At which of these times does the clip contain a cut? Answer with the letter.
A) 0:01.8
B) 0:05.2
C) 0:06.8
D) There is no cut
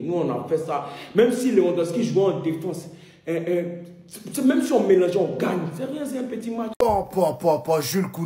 C